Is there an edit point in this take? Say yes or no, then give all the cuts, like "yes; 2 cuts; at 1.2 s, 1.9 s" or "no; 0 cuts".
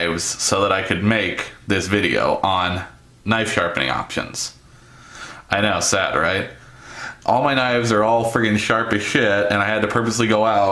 yes; 1 cut; at 6.0 s